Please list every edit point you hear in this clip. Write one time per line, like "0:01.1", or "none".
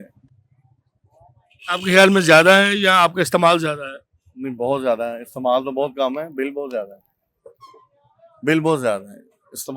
none